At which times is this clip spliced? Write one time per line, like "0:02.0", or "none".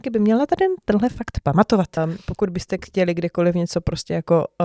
0:02.0